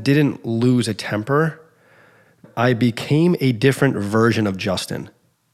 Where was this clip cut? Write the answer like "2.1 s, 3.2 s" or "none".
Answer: 2.4 s